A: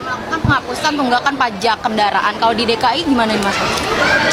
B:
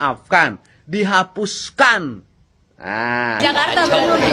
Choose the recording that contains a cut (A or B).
B